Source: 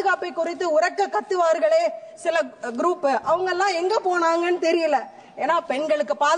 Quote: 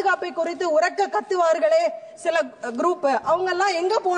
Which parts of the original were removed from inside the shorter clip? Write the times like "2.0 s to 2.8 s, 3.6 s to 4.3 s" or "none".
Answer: none